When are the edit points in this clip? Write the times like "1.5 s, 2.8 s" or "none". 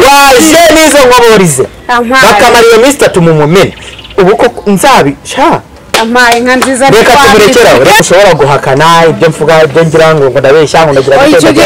8.0 s